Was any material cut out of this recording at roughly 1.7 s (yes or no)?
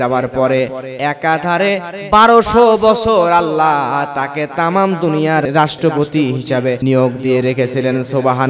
no